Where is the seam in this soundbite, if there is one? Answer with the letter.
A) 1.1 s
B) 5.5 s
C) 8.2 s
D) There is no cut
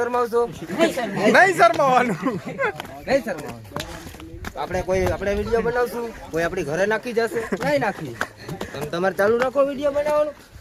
D